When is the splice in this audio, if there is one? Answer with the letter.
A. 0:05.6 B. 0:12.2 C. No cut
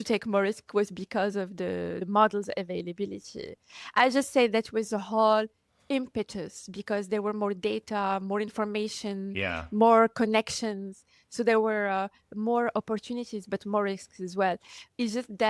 C